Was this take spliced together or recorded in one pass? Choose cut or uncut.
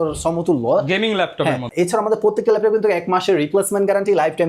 cut